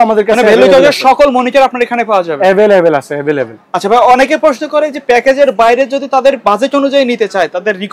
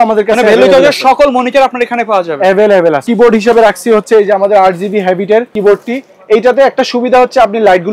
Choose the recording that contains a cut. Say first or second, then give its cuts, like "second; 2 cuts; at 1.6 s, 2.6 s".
second; 2 cuts; at 3.1 s, 5.5 s